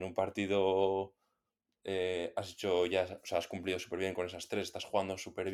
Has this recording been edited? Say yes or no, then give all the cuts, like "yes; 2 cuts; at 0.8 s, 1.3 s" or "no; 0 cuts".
no; 0 cuts